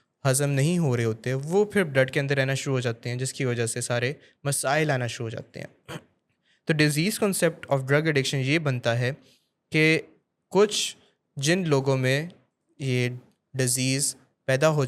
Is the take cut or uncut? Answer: uncut